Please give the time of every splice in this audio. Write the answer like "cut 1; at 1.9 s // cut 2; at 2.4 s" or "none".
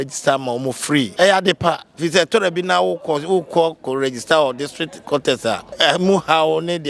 cut 1; at 1.1 s // cut 2; at 5.7 s